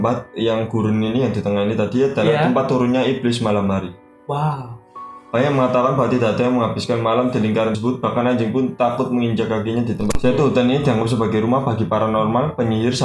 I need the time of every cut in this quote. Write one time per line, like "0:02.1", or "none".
0:10.1